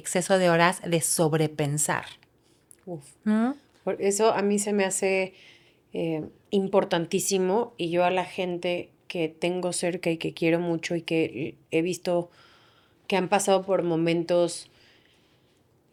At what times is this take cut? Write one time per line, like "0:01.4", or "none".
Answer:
none